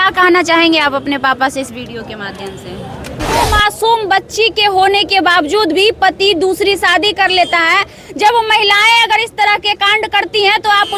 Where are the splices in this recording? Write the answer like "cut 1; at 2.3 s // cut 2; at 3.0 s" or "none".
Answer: cut 1; at 3.4 s